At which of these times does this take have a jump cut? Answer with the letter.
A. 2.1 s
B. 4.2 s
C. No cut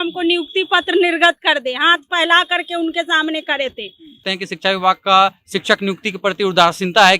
B